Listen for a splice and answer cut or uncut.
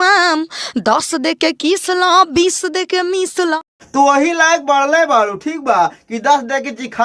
cut